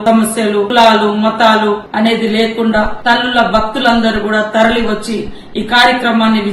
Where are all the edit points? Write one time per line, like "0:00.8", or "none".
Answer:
0:02.9